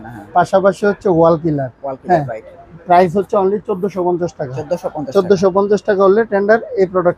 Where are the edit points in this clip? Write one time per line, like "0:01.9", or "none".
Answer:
none